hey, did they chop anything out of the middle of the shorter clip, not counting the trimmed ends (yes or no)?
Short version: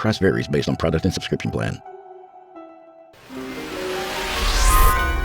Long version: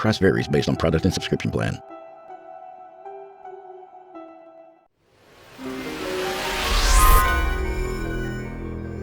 yes